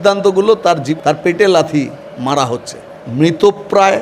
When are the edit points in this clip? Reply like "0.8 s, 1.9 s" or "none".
0.9 s, 3.0 s